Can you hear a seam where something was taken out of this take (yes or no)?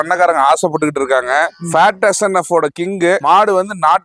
no